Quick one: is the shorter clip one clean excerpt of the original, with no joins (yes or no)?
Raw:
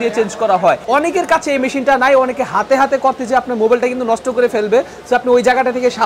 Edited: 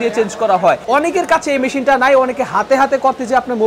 yes